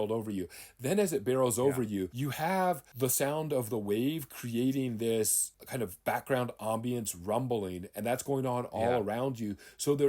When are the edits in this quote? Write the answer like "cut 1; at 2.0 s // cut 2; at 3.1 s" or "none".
none